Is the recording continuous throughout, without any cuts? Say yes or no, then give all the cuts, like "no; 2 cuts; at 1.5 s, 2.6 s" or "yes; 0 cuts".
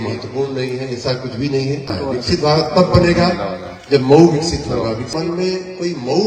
no; 2 cuts; at 1.9 s, 5.1 s